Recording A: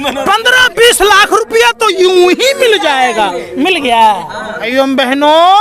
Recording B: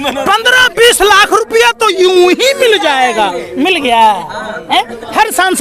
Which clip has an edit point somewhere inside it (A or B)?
A